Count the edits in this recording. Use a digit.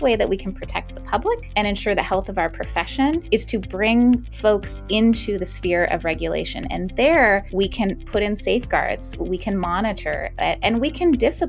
4